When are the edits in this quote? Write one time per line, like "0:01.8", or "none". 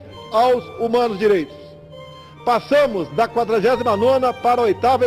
0:02.6